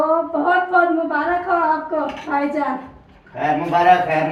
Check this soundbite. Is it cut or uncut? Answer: uncut